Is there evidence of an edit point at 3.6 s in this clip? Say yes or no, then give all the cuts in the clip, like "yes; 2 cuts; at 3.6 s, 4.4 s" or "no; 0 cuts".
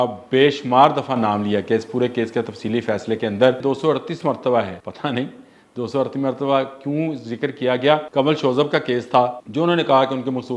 yes; 4 cuts; at 3.6 s, 4.8 s, 8.1 s, 9.4 s